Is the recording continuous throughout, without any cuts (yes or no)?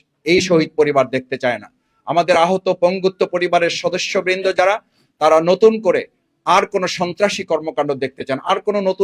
yes